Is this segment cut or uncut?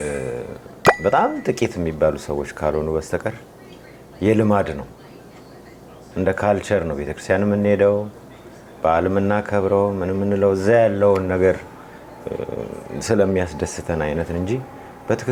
uncut